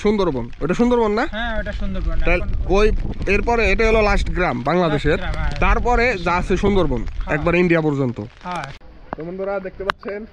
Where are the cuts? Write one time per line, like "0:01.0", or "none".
0:08.9